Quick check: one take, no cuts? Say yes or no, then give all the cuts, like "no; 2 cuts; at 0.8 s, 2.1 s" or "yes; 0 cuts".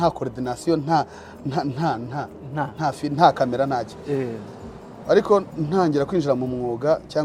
yes; 0 cuts